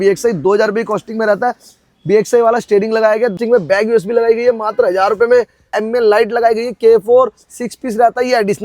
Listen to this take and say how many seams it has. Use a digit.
2